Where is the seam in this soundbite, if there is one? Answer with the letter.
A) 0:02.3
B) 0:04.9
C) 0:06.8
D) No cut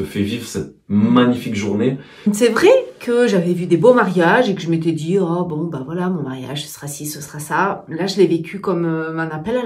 A